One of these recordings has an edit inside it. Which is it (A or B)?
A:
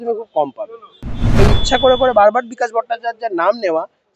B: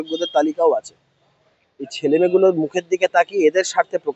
A